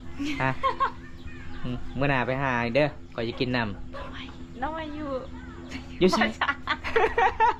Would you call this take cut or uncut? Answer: uncut